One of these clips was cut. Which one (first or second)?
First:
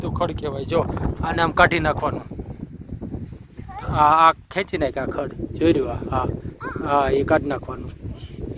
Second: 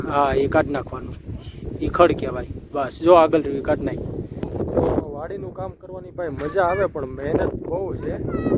second